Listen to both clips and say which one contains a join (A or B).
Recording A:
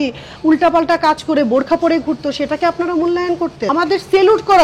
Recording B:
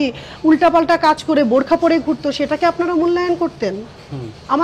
A